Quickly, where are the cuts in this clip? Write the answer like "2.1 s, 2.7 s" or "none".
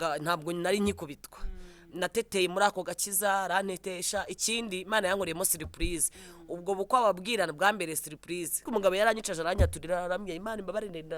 8.7 s